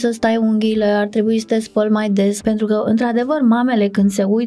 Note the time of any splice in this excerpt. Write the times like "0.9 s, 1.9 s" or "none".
2.3 s